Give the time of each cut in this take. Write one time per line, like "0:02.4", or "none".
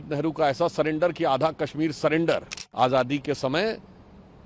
0:02.6